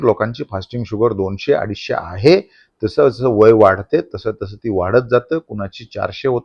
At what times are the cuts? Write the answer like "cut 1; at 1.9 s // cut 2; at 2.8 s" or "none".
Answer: none

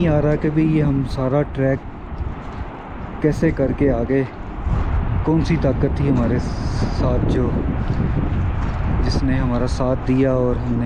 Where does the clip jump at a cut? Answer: none

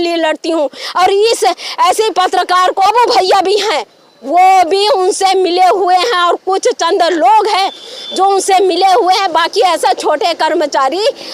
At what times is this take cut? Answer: cut 1; at 2.8 s

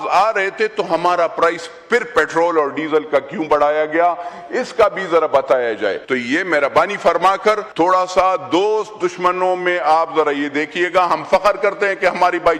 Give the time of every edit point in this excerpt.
cut 1; at 6.0 s // cut 2; at 7.7 s

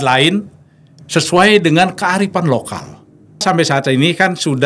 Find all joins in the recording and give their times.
cut 1; at 3.4 s

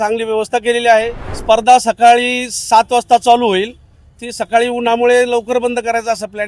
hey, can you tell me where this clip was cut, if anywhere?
cut 1; at 1.3 s

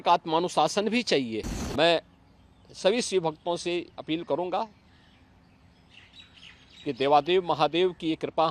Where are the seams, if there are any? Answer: cut 1; at 1.6 s

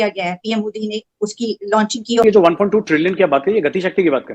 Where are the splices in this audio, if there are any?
cut 1; at 2.2 s

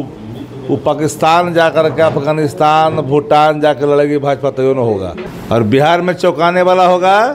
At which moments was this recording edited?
cut 1; at 5.3 s

